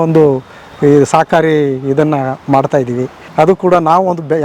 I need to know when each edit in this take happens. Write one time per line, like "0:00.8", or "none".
0:03.2